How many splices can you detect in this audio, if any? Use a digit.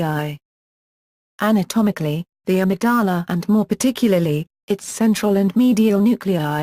1